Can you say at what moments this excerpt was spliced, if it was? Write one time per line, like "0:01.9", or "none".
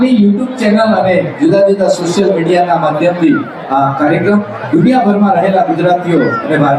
none